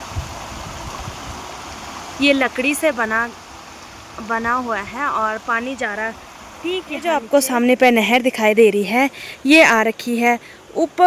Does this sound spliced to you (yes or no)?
yes